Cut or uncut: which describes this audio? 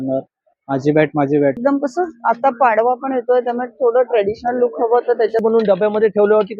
cut